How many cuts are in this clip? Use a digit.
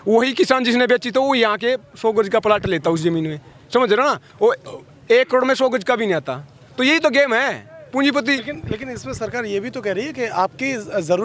0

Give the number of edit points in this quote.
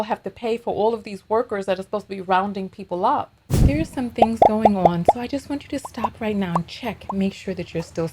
0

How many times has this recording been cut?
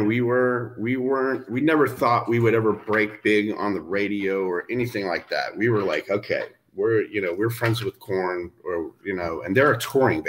0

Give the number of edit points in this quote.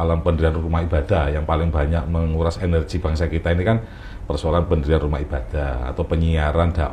0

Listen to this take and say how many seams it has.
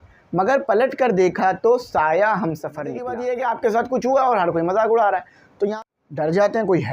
2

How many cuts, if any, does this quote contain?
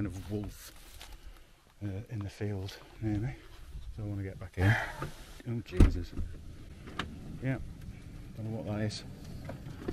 0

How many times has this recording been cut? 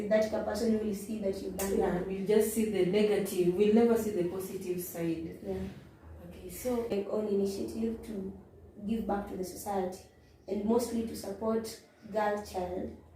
1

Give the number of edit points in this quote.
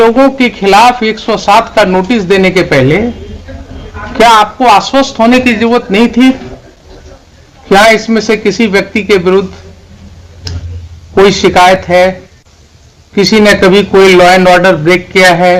0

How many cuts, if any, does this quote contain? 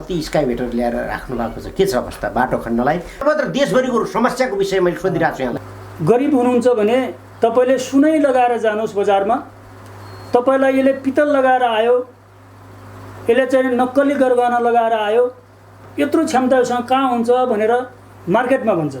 2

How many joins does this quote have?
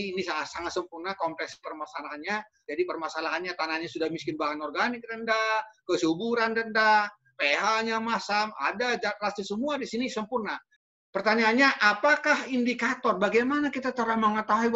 1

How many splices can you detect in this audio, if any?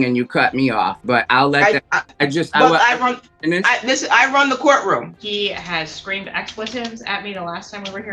3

